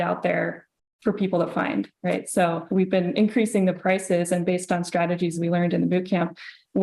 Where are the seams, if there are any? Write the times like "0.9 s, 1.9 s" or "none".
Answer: 2.6 s